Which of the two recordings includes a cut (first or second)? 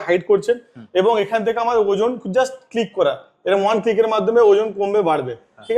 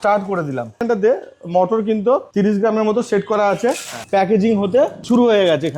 second